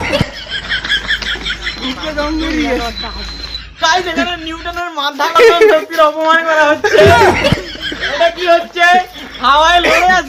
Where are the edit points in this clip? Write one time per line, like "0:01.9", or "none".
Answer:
none

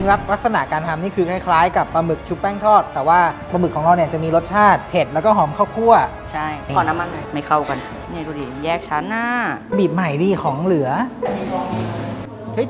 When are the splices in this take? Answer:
0:03.5
0:06.6

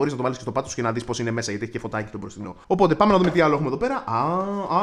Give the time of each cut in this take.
none

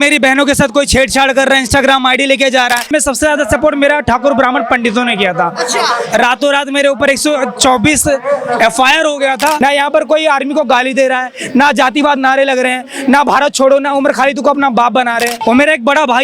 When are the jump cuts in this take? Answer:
0:02.9
0:09.6
0:15.4

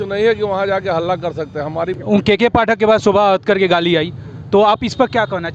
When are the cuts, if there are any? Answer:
0:02.0

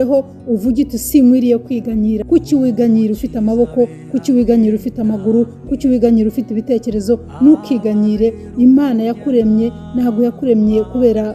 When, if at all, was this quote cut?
0:02.2
0:08.4

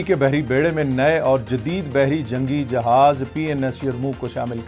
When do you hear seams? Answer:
none

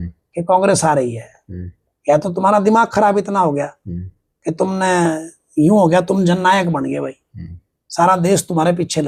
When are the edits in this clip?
none

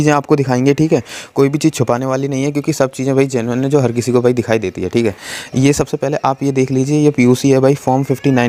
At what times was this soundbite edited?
none

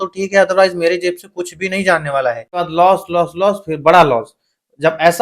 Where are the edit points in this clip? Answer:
0:02.6

